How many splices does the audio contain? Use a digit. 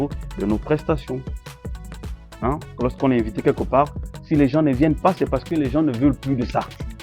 0